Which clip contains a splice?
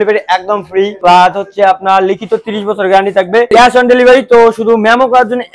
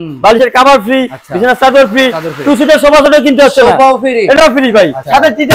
first; 1 cut; at 3.5 s

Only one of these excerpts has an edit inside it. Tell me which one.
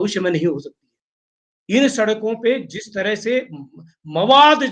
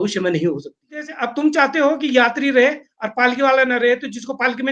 second; 1 cut; at 1.2 s

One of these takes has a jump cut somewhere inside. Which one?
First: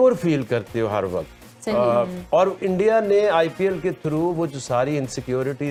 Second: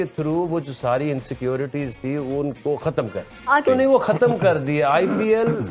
second; 1 cut; at 3.7 s

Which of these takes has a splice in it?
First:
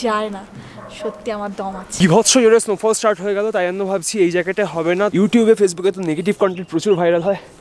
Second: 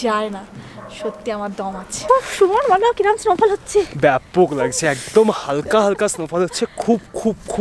first; 2 cuts; at 1.9 s, 5.1 s

